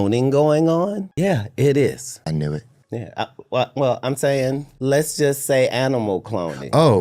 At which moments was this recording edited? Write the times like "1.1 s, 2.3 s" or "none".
1.0 s, 2.1 s, 4.7 s